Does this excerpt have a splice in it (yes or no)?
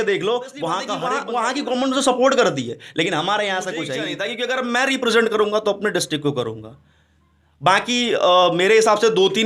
yes